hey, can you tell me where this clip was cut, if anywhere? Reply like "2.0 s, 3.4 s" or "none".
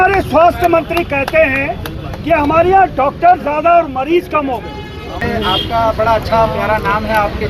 5.2 s